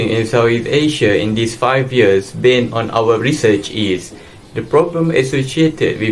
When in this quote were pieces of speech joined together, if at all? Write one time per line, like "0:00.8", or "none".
none